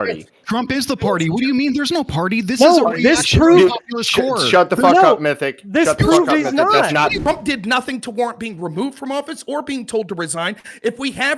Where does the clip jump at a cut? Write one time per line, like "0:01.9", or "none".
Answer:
0:07.2